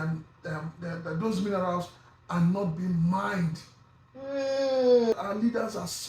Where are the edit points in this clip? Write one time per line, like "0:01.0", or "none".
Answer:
0:05.1